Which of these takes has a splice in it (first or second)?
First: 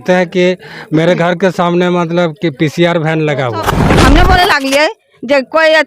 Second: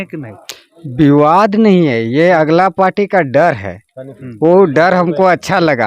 first